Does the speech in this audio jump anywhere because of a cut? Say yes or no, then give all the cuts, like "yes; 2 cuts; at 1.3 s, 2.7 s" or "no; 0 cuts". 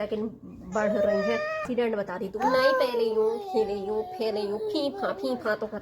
yes; 1 cut; at 1.7 s